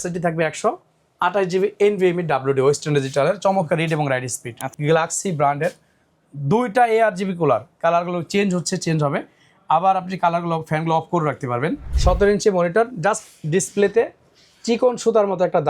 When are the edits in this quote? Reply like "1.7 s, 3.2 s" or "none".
4.8 s, 11.9 s